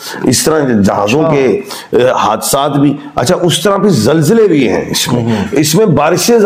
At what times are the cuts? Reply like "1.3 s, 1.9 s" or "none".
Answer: none